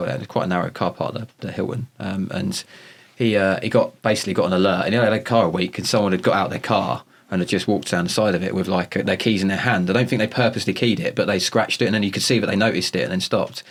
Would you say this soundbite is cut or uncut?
uncut